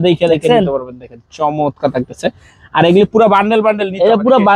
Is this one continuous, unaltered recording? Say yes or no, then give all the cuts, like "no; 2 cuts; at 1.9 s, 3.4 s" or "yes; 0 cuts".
yes; 0 cuts